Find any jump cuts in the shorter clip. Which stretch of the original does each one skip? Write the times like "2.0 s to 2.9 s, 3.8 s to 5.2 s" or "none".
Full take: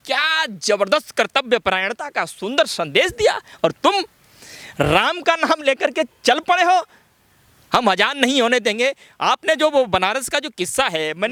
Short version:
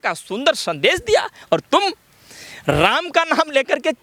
none